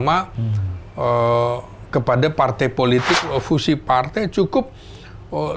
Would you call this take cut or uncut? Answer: cut